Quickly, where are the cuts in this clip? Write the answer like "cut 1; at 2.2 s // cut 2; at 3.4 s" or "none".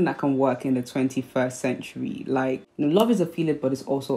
cut 1; at 2.6 s